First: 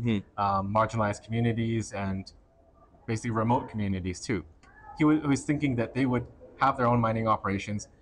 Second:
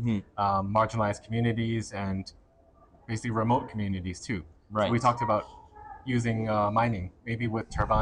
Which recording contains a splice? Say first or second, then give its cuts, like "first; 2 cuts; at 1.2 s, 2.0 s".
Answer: first; 1 cut; at 4.6 s